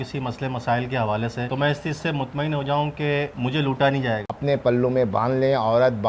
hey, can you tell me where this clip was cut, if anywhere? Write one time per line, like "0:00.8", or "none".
0:01.4
0:03.3
0:04.2